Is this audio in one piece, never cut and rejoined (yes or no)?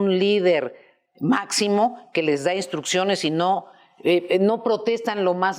yes